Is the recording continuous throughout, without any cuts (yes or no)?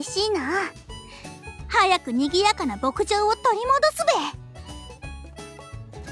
no